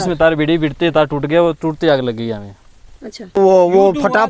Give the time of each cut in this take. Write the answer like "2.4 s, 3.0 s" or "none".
3.4 s

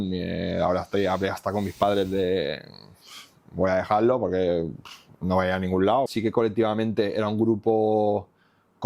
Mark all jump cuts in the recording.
6.1 s

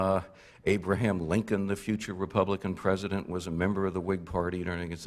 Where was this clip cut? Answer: 2.7 s

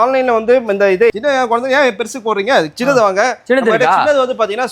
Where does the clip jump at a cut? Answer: 1.1 s

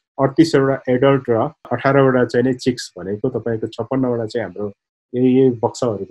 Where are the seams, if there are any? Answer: none

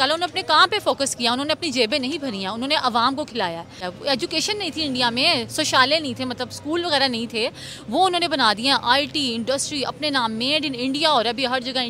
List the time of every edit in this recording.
3.8 s

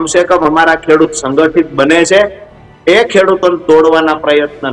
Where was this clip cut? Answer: none

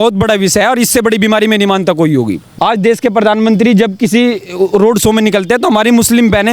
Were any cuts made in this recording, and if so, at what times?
2.5 s

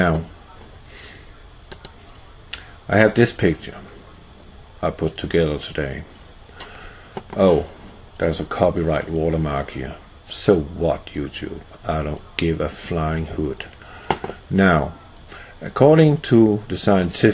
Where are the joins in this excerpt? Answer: 10.7 s

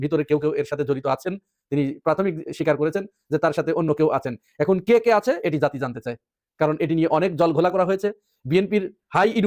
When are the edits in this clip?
none

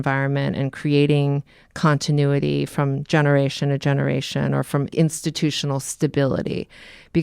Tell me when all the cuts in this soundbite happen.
4.9 s

